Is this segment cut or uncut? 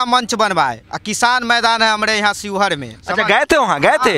uncut